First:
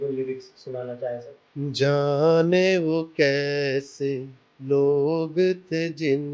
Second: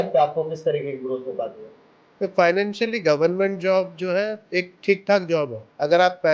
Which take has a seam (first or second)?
first